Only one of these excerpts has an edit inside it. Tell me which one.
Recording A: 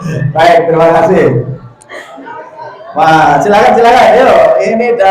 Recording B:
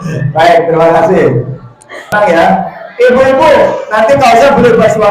B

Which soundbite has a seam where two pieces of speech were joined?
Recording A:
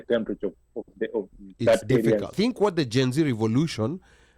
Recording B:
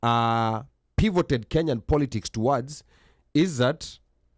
A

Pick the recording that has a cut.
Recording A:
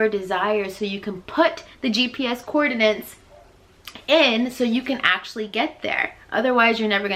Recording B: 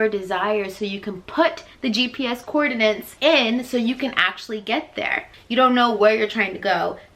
B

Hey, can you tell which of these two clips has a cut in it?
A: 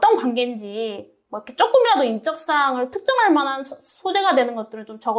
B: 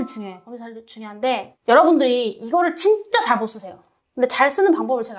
B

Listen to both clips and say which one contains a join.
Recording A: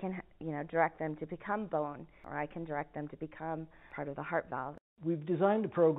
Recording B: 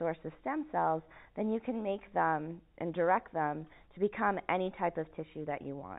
A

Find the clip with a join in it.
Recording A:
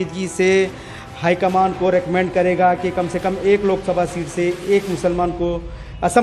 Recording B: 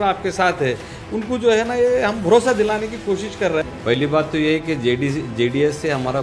B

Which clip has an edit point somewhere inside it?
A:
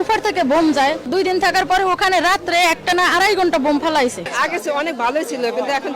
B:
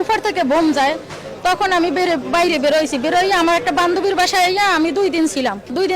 A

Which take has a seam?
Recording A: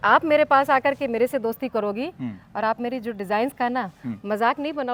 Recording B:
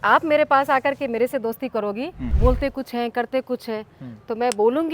B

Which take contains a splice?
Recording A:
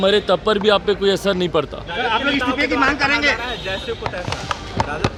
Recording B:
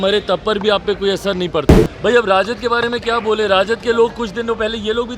B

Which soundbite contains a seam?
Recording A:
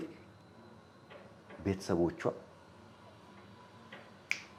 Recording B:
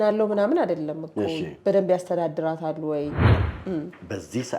B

